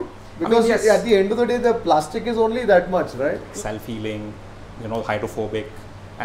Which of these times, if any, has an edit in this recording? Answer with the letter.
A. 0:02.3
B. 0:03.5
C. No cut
B